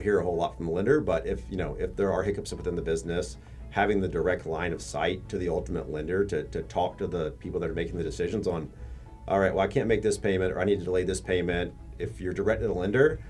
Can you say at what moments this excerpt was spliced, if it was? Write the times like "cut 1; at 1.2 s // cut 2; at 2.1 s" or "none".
none